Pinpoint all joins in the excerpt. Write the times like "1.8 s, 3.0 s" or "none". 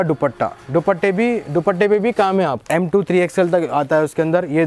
2.6 s